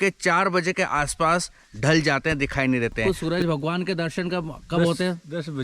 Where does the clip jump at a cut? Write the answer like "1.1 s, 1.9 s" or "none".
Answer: 3.0 s